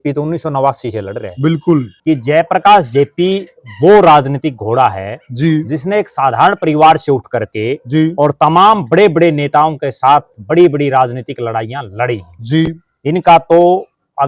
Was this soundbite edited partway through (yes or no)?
yes